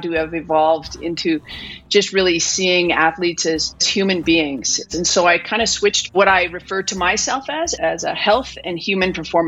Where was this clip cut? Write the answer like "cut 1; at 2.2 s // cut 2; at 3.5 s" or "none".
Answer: cut 1; at 3.9 s // cut 2; at 4.8 s // cut 3; at 6.1 s // cut 4; at 7.7 s